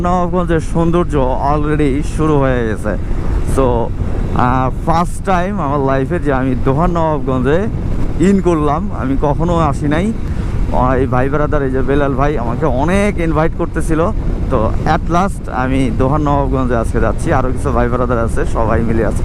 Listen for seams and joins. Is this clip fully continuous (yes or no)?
yes